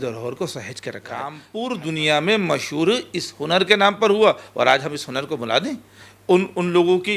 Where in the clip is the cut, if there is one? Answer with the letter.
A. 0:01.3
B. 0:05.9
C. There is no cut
A